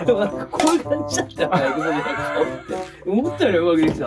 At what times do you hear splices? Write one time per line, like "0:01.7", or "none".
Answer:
none